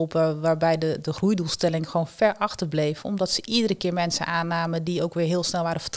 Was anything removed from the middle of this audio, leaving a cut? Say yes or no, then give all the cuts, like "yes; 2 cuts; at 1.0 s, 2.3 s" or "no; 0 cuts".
no; 0 cuts